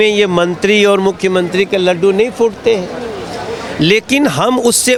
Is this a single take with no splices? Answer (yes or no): yes